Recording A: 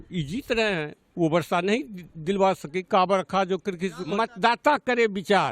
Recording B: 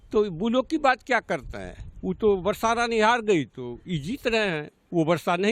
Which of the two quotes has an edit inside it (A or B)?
A